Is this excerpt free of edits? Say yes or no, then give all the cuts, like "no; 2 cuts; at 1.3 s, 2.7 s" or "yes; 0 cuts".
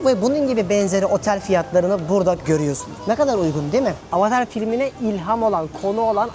no; 1 cut; at 4.0 s